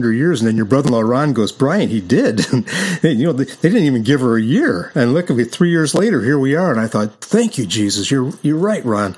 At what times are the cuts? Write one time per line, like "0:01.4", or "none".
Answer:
none